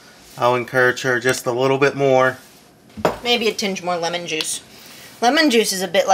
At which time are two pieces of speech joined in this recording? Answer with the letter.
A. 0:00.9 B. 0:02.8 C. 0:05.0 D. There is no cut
B